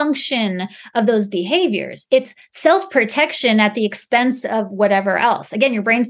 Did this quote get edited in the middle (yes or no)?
no